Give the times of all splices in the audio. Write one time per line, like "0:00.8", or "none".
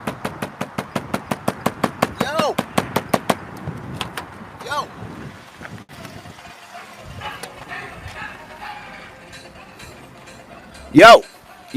none